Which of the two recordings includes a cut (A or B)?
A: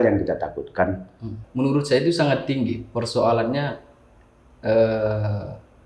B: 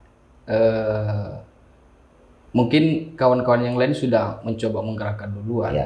A